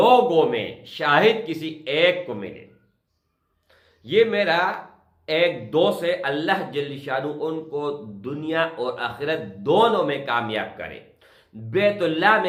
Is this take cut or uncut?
uncut